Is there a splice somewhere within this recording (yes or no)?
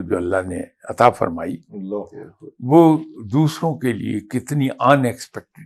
no